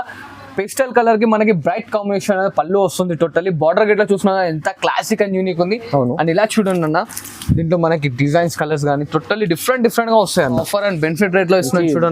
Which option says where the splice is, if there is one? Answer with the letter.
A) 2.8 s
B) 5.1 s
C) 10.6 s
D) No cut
C